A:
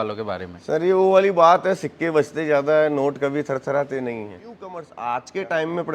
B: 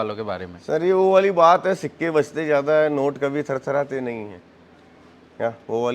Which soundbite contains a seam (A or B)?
A